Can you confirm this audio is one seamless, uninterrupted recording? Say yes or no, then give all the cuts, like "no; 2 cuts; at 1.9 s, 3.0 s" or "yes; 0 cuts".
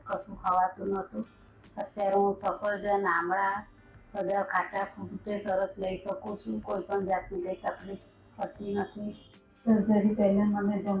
no; 1 cut; at 9.3 s